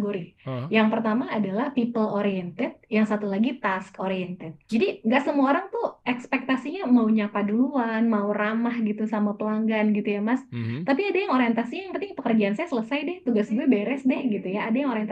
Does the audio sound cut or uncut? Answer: cut